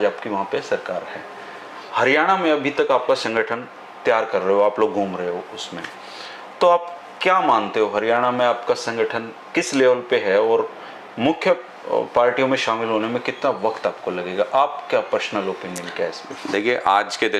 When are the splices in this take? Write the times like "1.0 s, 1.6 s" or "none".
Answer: none